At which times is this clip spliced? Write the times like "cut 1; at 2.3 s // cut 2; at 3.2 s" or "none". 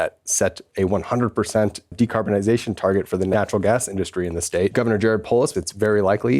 cut 1; at 1.9 s // cut 2; at 3.3 s // cut 3; at 4.7 s // cut 4; at 5.5 s